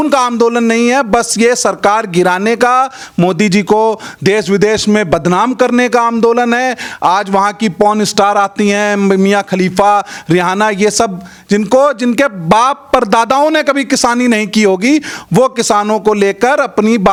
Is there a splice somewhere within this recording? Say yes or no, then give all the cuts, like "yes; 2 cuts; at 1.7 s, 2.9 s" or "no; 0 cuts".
no; 0 cuts